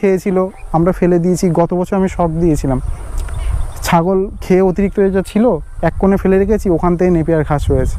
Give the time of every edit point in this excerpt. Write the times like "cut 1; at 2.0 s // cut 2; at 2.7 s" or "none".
none